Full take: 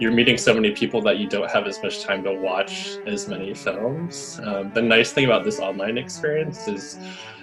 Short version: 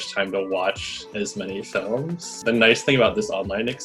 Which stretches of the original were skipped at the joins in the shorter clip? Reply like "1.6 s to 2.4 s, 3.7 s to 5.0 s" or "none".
4.3 s to 4.7 s